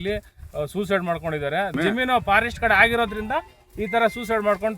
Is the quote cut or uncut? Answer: cut